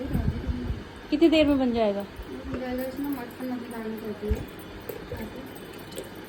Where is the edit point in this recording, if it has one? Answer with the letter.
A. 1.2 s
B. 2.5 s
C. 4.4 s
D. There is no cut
D